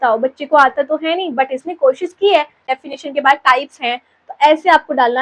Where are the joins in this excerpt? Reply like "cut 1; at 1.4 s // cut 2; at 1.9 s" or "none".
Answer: cut 1; at 2.7 s